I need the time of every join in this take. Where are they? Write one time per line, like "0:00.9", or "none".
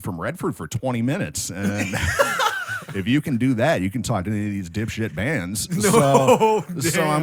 none